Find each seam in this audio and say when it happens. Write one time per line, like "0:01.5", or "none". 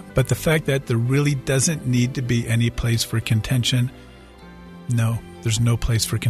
0:04.4